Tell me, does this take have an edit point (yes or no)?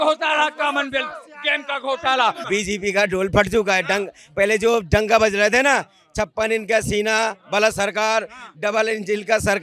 yes